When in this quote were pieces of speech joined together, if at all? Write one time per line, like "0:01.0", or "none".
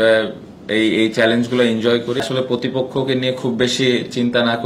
0:02.2